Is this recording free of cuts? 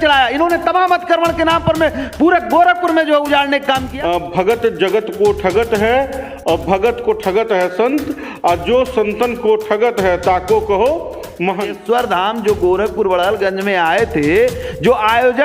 no; 2 cuts; at 3.9 s, 11.7 s

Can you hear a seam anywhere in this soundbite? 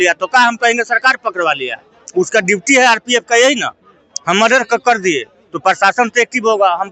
no; 0 cuts

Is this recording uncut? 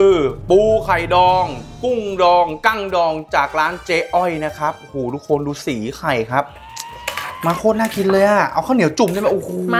no; 1 cut; at 6.5 s

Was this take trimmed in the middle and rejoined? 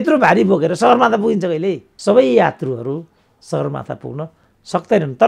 yes; 1 cut; at 1.9 s

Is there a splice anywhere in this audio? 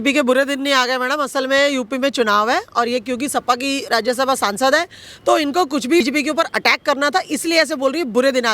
yes; 1 cut; at 6.0 s

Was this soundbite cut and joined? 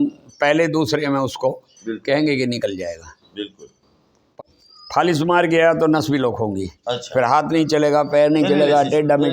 yes; 1 cut; at 4.3 s

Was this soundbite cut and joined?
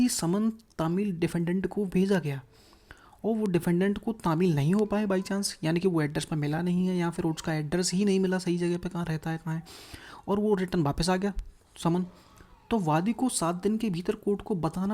no; 0 cuts

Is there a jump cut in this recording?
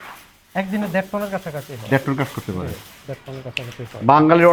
no; 0 cuts

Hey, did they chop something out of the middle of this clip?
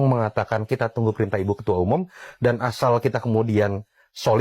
no; 0 cuts

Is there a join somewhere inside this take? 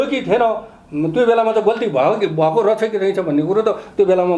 no; 0 cuts

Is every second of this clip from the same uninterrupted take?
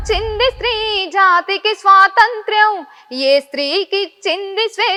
yes; 0 cuts

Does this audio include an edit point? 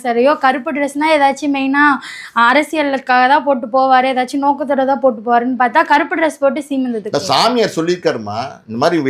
no; 0 cuts

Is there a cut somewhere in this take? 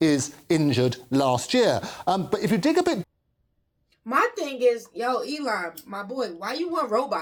no; 0 cuts

